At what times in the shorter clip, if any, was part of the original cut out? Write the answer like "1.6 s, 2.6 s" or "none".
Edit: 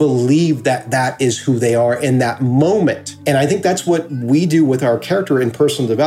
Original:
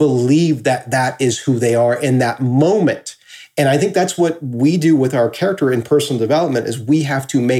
3.1 s